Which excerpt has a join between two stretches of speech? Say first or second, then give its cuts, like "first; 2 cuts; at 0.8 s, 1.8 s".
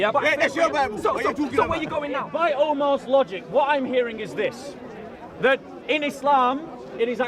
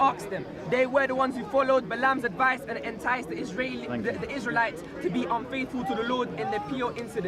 first; 1 cut; at 2.3 s